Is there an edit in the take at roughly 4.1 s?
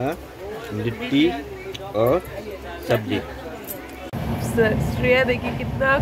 yes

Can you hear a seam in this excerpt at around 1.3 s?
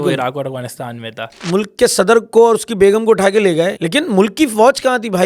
yes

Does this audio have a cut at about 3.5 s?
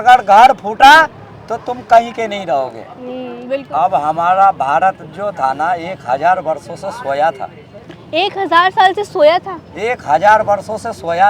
yes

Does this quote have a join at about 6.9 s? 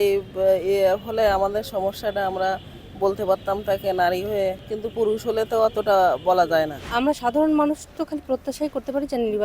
yes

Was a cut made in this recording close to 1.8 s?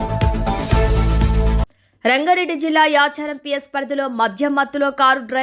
yes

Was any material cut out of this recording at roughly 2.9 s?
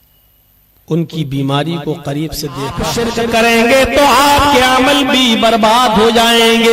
yes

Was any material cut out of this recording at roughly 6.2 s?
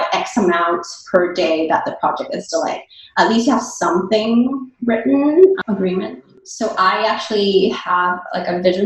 yes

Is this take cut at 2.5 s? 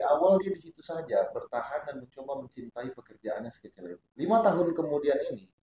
no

